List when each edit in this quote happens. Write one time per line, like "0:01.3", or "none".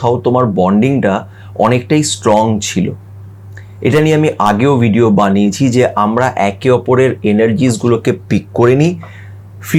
none

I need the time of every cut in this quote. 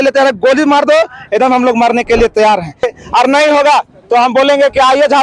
0:02.9

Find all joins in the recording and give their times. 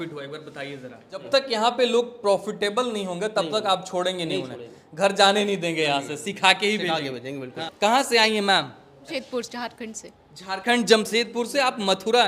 0:01.2
0:07.6
0:09.1

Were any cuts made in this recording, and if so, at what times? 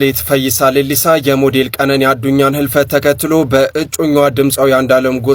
none

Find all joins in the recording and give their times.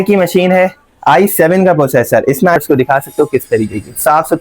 0:02.6

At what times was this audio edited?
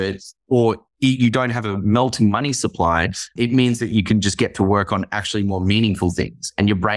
0:03.3

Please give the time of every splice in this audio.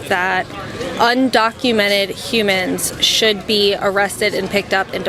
none

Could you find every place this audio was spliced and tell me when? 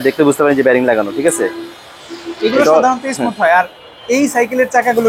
none

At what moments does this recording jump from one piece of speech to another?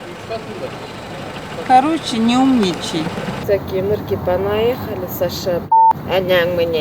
0:03.4

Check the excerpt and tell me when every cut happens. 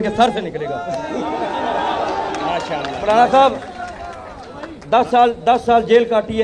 none

